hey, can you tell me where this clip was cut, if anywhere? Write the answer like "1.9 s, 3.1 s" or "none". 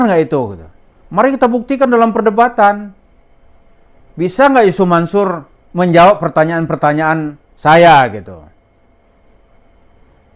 none